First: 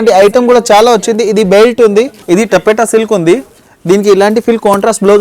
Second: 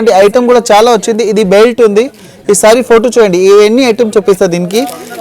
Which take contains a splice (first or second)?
first